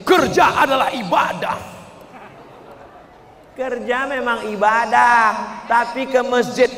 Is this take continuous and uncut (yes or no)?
yes